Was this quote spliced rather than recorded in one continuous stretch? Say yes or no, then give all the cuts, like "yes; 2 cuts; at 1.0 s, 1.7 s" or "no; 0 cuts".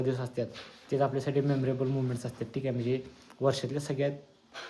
no; 0 cuts